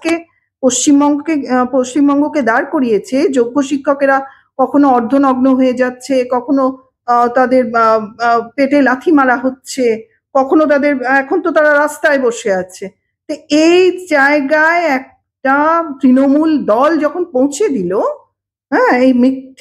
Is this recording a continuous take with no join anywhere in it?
yes; 0 cuts

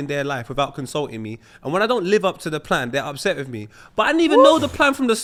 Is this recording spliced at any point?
no; 0 cuts

